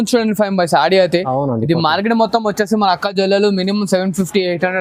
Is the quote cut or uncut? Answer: uncut